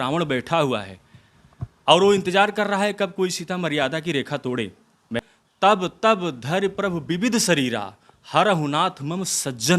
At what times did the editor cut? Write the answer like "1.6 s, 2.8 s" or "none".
5.2 s